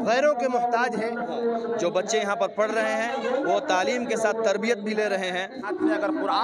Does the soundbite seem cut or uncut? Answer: cut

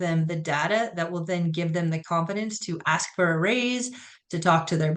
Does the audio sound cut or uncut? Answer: uncut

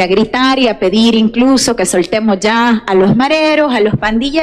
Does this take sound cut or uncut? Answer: uncut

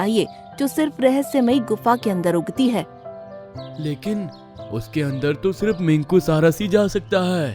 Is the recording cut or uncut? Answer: uncut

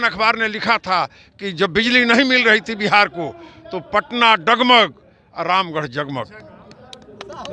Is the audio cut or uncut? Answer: uncut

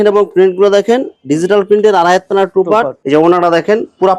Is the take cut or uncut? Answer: uncut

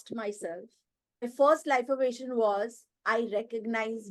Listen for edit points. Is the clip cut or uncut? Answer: cut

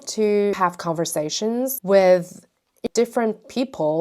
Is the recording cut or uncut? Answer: cut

